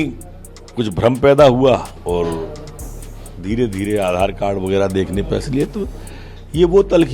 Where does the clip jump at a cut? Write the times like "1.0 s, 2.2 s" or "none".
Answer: 1.9 s